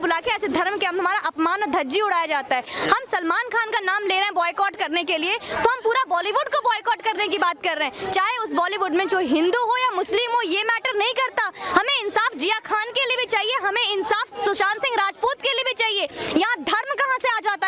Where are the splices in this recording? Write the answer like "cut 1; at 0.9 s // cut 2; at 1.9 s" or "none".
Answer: cut 1; at 2.7 s